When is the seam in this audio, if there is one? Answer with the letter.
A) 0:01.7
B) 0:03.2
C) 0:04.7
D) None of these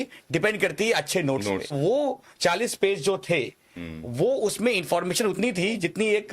A